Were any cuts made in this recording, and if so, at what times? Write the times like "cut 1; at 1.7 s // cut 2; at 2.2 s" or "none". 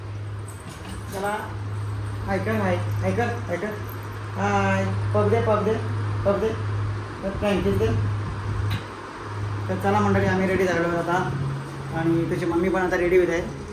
none